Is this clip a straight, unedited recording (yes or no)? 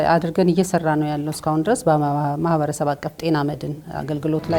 yes